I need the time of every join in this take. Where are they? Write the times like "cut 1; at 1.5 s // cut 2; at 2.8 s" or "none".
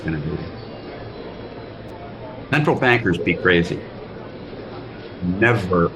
none